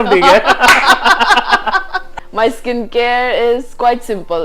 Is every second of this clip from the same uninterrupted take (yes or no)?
no